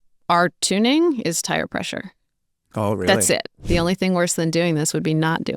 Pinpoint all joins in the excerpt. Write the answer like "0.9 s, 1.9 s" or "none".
3.6 s